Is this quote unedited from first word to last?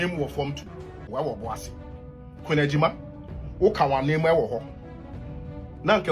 no; 1 cut; at 1.1 s

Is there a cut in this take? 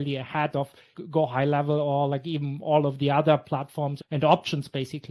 yes; 1 cut; at 1.0 s

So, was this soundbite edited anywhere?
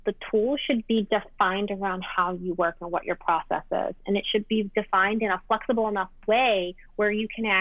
no; 0 cuts

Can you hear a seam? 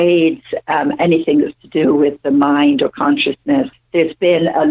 yes; 1 cut; at 3.8 s

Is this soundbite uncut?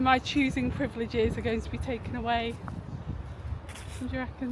yes; 0 cuts

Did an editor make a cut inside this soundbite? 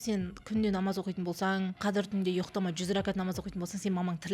yes; 1 cut; at 1.8 s

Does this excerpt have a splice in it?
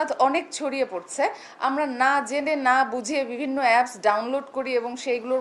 no; 0 cuts

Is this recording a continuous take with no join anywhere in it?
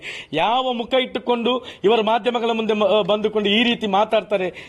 yes; 0 cuts

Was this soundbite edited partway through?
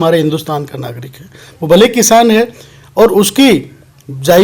no; 0 cuts

